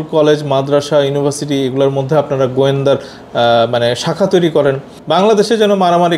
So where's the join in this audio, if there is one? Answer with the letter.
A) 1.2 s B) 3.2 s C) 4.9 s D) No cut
D